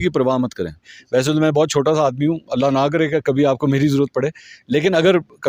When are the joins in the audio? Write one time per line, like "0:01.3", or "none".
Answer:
0:00.9